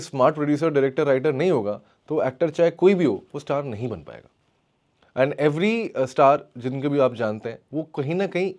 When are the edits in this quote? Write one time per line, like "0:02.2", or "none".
none

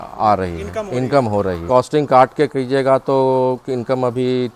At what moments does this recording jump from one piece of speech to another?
0:01.6

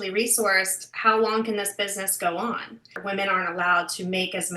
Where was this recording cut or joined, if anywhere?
0:02.9

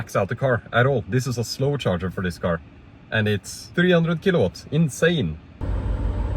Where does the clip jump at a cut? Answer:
0:03.6
0:05.6

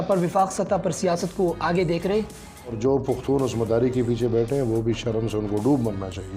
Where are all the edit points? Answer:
0:02.8

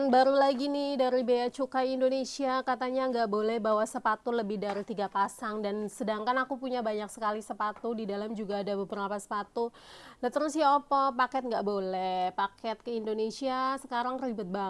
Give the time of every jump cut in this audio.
none

